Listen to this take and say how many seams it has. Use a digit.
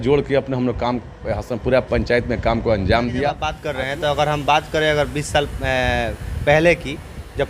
1